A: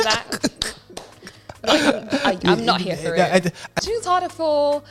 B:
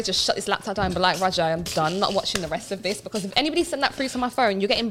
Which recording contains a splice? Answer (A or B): A